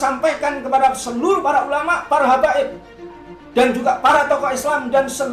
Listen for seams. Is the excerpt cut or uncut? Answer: uncut